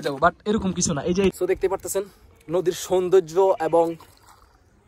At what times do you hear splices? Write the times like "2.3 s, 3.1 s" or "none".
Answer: 1.3 s